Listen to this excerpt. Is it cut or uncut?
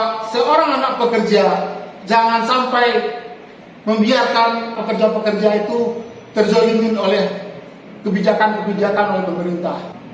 cut